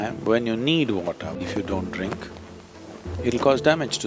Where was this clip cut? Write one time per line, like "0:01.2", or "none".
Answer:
0:01.4